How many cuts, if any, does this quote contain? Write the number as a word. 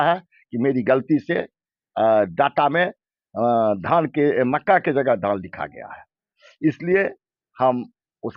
zero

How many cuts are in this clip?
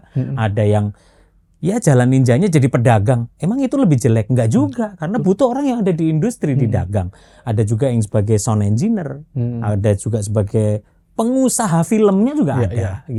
zero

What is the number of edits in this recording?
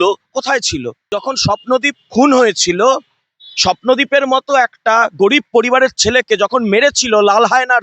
one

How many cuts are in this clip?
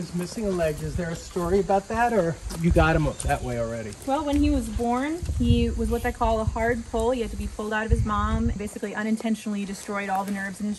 three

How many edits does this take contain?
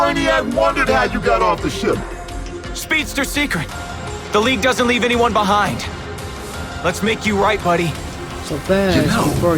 zero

